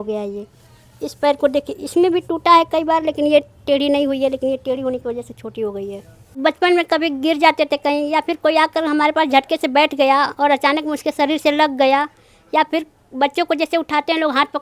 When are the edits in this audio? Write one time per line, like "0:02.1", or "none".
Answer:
0:06.3

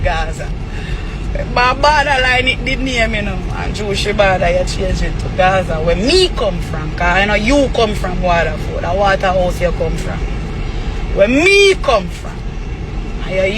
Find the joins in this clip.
none

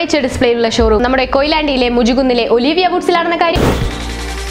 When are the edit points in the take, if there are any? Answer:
0:03.5

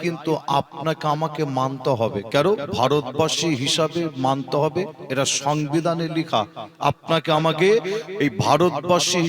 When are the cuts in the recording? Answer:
none

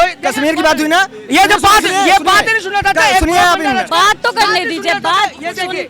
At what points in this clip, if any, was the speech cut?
none

